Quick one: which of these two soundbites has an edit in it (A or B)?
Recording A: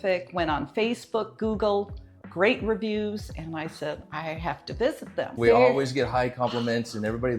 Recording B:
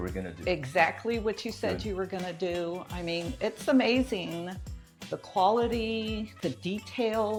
A